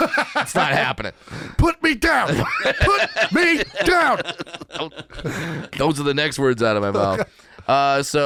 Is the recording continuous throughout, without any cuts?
yes; 0 cuts

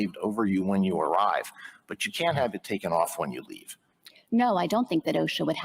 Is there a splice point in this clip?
no; 0 cuts

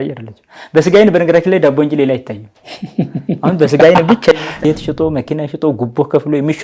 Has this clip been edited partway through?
yes; 1 cut; at 4.4 s

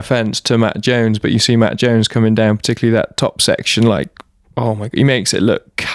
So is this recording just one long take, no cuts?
yes; 0 cuts

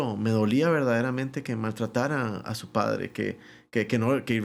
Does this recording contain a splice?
no; 0 cuts

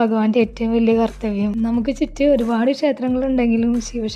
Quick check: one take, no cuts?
no; 1 cut; at 1.5 s

